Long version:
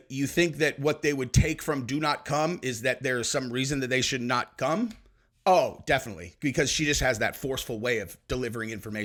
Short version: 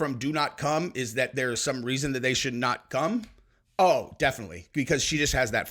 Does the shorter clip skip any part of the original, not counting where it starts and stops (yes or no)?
no